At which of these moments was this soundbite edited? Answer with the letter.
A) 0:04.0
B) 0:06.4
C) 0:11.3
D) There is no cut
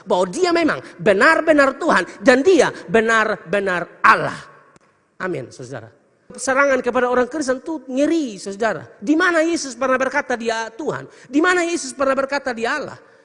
B